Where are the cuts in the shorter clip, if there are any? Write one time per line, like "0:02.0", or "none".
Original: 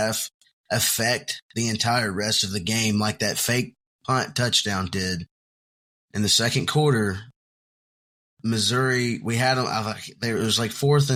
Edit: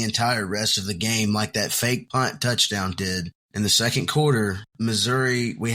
0:02.1
0:03.4
0:04.6